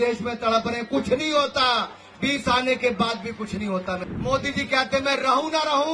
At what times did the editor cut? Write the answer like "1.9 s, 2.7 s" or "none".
4.1 s